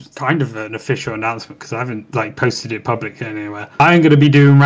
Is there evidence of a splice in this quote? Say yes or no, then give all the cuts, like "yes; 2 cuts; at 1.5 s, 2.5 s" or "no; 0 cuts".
no; 0 cuts